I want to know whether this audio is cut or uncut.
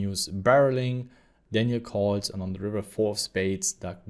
uncut